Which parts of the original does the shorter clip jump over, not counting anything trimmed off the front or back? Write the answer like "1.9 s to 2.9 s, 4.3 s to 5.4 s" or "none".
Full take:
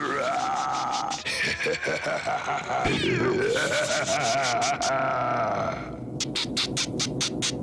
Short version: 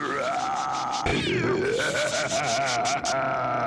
1.1 s to 2.8 s